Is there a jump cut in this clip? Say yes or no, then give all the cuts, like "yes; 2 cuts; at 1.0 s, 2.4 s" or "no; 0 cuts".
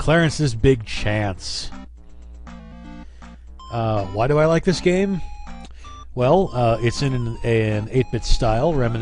yes; 1 cut; at 6.5 s